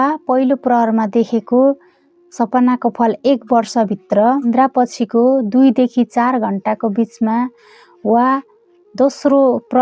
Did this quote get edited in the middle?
yes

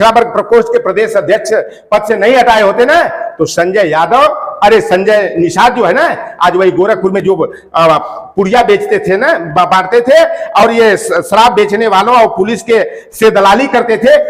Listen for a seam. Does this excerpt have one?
no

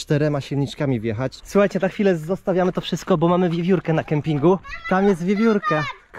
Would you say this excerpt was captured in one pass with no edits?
no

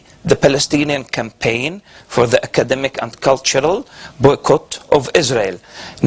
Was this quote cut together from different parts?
yes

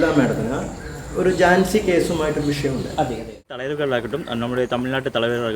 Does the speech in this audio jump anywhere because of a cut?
yes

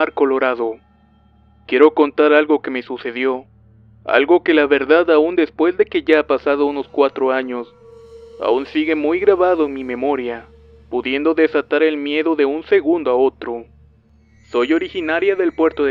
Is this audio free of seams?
yes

